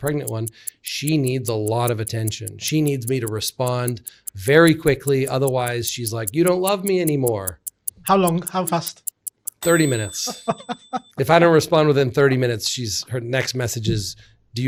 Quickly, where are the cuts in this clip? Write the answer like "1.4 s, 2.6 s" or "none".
none